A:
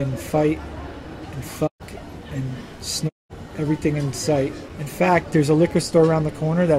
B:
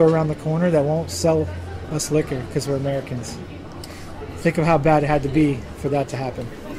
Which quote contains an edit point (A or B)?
A